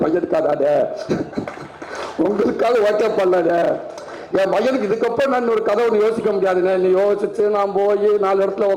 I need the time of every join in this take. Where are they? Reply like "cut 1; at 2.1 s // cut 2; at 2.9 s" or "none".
none